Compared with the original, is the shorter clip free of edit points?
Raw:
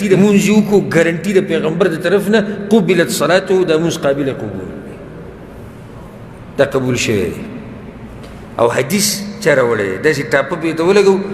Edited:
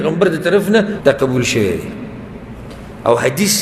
no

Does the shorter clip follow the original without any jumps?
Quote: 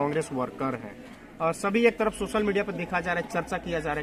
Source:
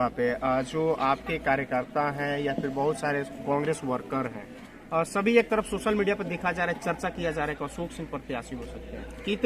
yes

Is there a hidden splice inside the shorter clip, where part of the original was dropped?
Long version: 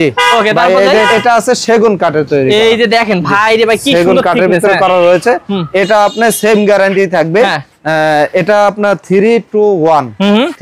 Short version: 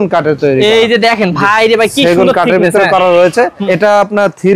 yes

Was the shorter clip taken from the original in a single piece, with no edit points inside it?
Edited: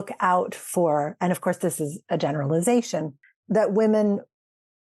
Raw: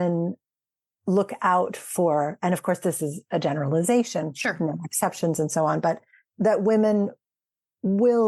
no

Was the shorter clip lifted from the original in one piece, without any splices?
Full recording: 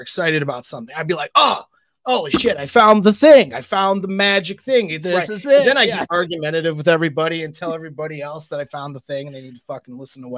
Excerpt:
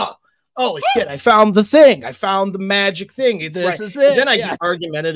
yes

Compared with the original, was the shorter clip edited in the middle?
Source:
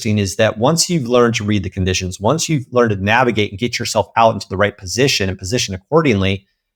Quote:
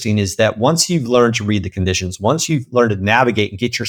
no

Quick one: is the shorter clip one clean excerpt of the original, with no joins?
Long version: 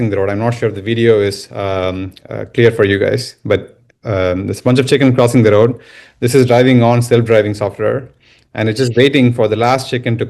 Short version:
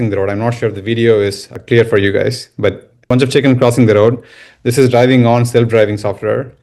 no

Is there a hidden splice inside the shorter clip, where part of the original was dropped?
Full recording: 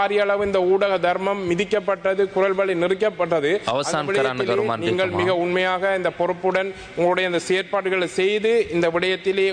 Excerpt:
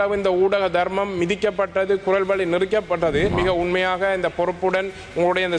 yes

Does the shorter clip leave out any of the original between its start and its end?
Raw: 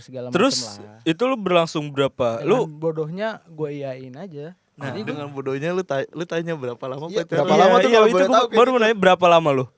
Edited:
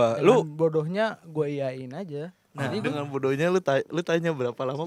no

